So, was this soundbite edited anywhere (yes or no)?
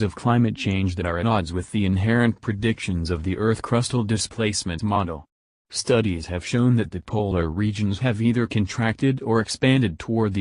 yes